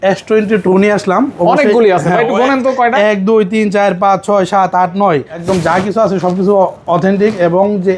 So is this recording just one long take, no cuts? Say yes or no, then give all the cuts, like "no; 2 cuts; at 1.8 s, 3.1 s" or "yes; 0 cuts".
no; 1 cut; at 5.4 s